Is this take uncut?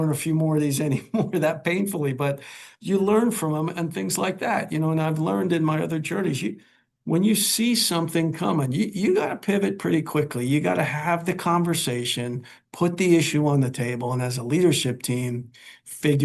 yes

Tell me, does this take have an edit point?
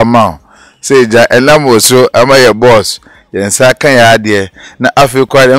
no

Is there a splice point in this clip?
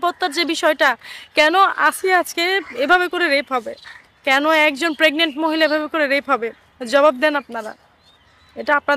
no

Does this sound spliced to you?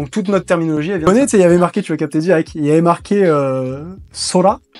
yes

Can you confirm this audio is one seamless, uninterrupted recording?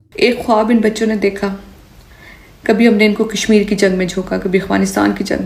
yes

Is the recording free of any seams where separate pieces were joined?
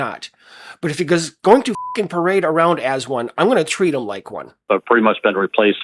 no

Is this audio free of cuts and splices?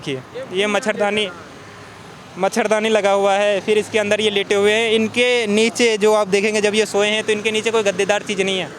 yes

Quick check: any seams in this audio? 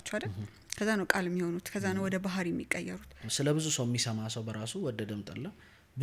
yes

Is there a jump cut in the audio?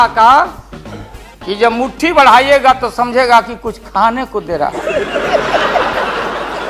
no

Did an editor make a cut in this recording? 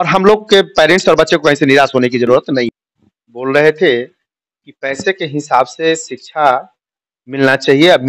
yes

